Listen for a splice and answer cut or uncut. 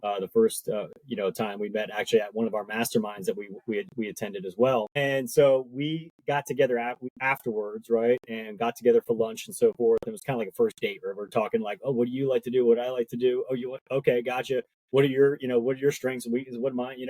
cut